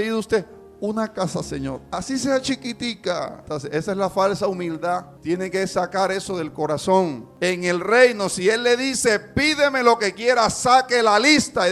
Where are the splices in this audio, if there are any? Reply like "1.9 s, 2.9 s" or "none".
3.4 s, 5.1 s, 7.2 s